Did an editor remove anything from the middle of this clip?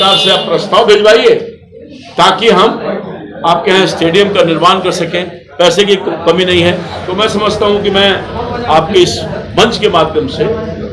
yes; 1 cut; at 7.0 s

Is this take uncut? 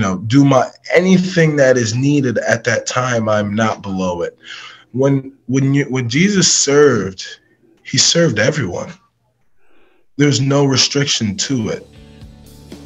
yes; 0 cuts

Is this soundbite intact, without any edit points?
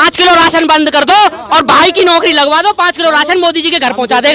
yes; 0 cuts

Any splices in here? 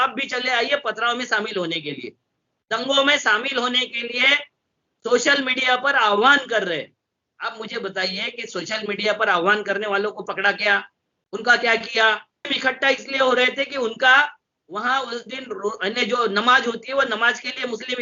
no; 0 cuts

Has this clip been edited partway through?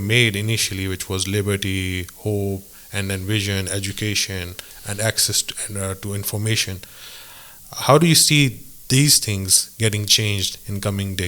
no; 0 cuts

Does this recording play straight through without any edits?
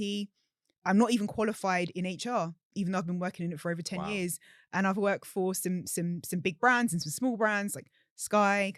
yes; 0 cuts

